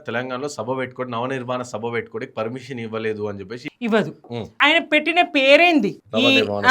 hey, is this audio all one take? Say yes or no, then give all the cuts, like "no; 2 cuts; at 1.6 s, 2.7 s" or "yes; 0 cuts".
no; 2 cuts; at 3.6 s, 4.4 s